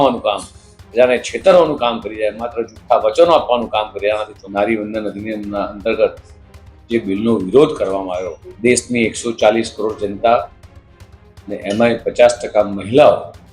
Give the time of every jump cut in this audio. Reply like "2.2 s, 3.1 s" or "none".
4.4 s, 8.4 s